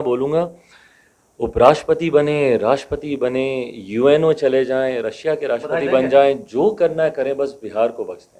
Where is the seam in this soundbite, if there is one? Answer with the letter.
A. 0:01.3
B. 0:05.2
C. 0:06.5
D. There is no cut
D